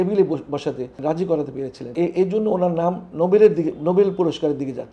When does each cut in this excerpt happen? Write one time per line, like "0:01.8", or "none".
0:00.9
0:01.9